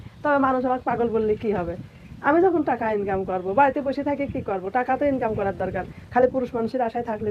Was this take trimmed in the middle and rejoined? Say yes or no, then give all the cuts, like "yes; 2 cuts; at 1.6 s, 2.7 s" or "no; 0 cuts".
no; 0 cuts